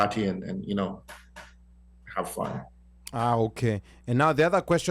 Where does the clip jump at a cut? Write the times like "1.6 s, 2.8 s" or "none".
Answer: none